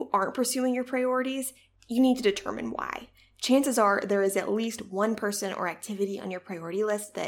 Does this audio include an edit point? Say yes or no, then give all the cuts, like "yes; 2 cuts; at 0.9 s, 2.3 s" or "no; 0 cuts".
no; 0 cuts